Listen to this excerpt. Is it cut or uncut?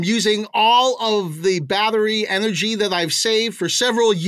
uncut